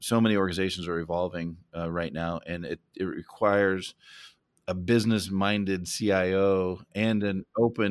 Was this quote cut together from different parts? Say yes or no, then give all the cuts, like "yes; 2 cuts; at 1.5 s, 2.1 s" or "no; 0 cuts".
no; 0 cuts